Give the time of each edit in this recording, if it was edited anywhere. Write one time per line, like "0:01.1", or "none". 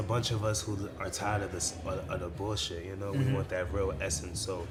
none